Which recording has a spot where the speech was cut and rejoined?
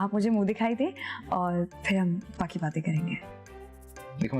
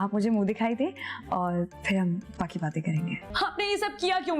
second; 1 cut; at 3.3 s

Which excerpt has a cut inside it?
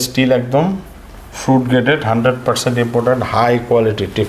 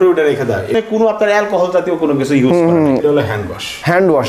second; 2 cuts; at 1.0 s, 3.0 s

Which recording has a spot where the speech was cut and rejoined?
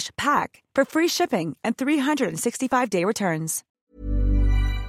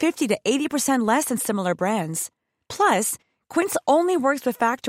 first; 1 cut; at 3.8 s

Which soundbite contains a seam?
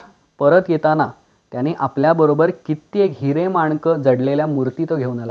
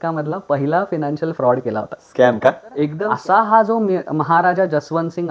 second; 1 cut; at 3.0 s

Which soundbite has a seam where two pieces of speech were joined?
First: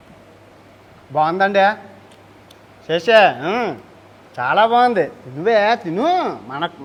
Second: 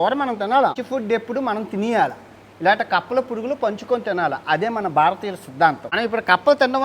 second; 2 cuts; at 0.8 s, 5.9 s

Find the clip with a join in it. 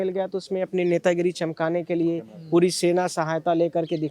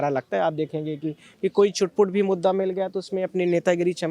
second; 1 cut; at 1.3 s

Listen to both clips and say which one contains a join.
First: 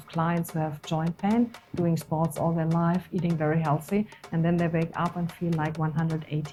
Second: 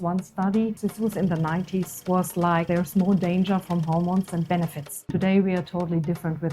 second; 4 cuts; at 0.8 s, 2.0 s, 2.7 s, 5.1 s

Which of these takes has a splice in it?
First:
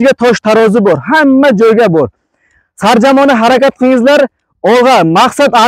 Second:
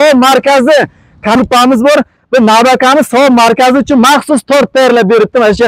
second; 1 cut; at 1.4 s

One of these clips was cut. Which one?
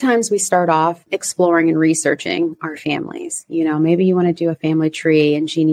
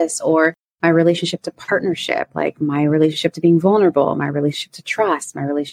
first; 1 cut; at 1.1 s

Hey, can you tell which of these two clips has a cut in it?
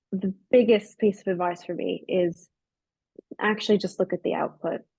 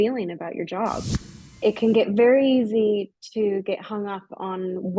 second; 1 cut; at 1.2 s

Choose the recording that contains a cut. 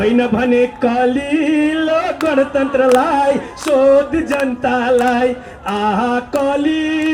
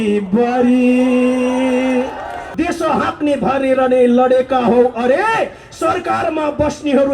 second; 1 cut; at 2.4 s

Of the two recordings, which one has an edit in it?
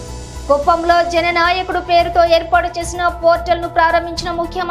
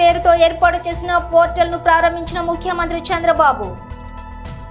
second; 1 cut; at 3.8 s

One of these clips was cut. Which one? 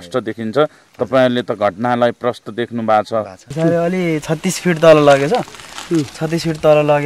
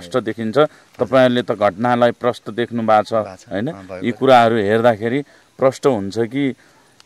first; 1 cut; at 3.4 s

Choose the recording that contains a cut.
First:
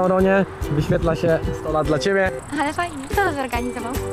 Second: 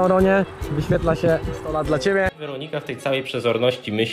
second; 1 cut; at 2.4 s

